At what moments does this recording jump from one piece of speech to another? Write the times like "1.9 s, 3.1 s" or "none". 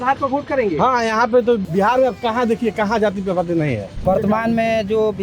1.6 s, 3.9 s